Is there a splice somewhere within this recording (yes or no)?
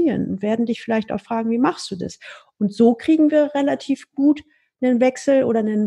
no